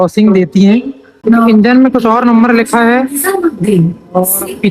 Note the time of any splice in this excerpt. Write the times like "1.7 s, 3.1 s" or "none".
1.1 s